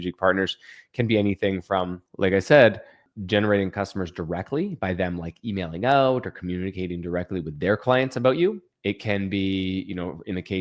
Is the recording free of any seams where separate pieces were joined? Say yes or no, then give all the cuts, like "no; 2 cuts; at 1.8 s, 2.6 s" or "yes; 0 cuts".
no; 3 cuts; at 2.0 s, 3.0 s, 8.7 s